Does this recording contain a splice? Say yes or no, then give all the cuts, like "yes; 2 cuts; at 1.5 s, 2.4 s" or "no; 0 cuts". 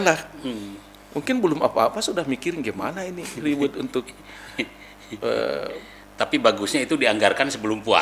no; 0 cuts